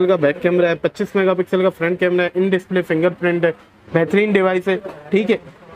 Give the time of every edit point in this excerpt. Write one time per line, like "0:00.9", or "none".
none